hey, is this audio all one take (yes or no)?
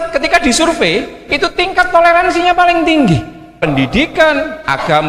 no